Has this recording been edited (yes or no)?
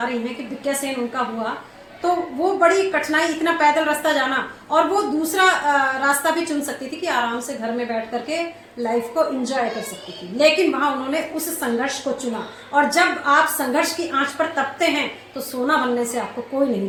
no